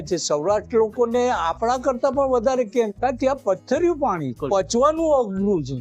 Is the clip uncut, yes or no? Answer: no